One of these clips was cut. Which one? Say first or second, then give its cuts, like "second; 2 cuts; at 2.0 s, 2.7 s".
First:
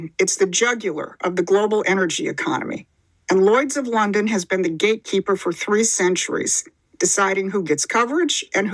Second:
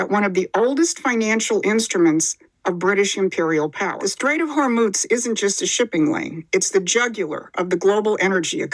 second; 1 cut; at 4.0 s